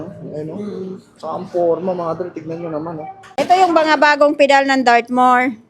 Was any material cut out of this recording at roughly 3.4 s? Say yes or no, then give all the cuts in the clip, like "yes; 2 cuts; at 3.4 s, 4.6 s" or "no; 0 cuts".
yes; 1 cut; at 3.4 s